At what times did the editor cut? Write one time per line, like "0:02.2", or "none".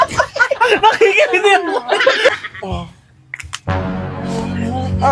0:02.3